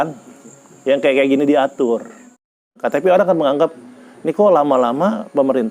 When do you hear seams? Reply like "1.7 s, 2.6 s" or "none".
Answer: 2.7 s